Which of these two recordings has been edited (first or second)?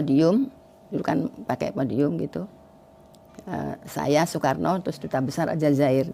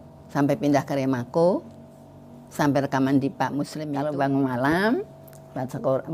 second